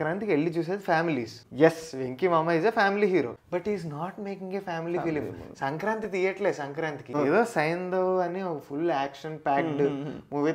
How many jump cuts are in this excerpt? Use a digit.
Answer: 3